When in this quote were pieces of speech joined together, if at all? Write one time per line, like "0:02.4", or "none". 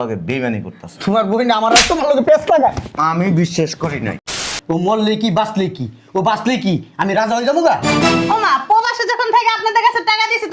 0:04.3